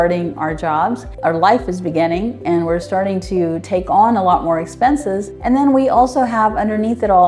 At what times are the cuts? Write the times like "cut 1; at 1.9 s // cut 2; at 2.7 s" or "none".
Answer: none